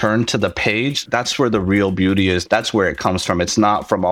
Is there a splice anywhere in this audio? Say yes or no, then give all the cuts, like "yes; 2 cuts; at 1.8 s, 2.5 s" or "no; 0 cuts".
yes; 2 cuts; at 1.0 s, 2.4 s